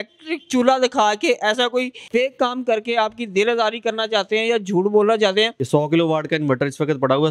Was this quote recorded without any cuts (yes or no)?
no